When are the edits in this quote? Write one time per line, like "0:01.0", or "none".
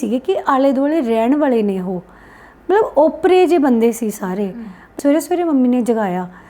0:04.9